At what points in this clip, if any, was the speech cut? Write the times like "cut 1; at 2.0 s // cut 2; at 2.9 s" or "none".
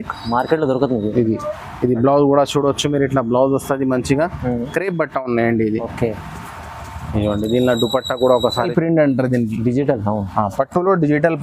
cut 1; at 8.7 s

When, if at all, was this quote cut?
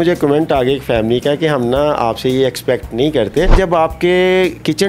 cut 1; at 3.5 s

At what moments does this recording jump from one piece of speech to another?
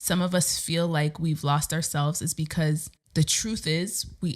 cut 1; at 3.0 s

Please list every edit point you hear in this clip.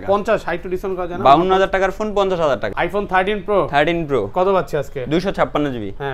cut 1; at 2.7 s

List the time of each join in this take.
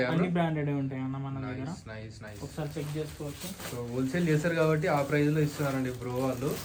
none

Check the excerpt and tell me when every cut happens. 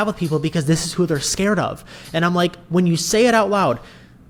none

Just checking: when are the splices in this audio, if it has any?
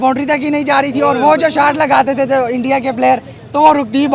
none

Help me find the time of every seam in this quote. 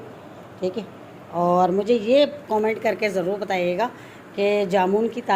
none

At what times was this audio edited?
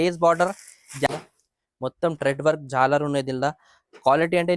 cut 1; at 1.1 s

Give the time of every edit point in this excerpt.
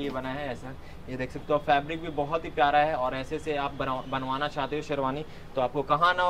none

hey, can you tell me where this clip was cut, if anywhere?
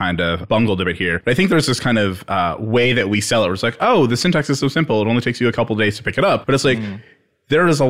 cut 1; at 1.2 s // cut 2; at 6.4 s

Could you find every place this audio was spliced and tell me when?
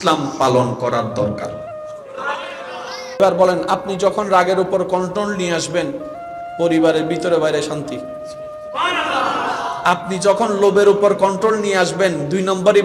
cut 1; at 3.2 s

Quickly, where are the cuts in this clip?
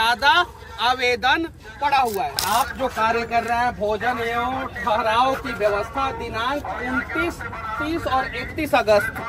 cut 1; at 2.4 s

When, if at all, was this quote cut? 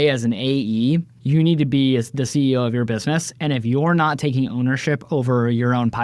cut 1; at 1.1 s

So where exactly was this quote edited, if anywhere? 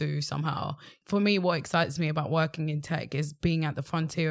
cut 1; at 1.0 s

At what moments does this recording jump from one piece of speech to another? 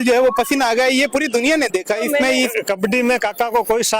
cut 1; at 2.6 s

